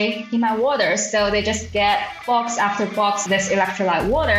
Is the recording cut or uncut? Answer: cut